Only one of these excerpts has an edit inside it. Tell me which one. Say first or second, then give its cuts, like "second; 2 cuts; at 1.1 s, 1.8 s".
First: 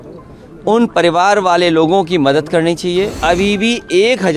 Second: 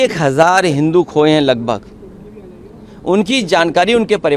first; 1 cut; at 3.2 s